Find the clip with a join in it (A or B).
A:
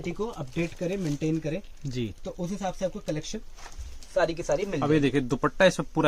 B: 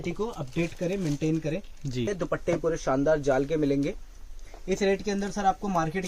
B